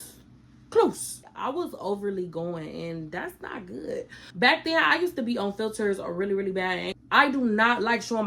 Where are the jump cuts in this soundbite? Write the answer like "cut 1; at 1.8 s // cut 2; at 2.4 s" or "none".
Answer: cut 1; at 1.3 s // cut 2; at 4.2 s // cut 3; at 6.9 s